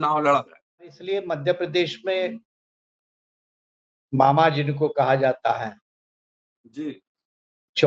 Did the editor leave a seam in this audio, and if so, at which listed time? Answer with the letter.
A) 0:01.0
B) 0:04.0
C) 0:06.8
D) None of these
A